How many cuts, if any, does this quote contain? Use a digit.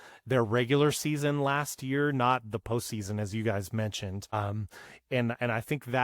1